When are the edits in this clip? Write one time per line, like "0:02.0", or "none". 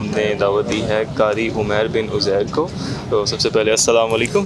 none